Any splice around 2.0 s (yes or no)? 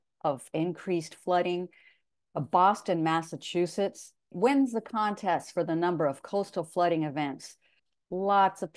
yes